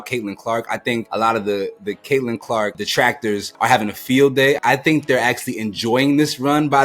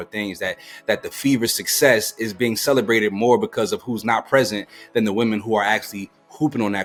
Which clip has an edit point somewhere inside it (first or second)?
first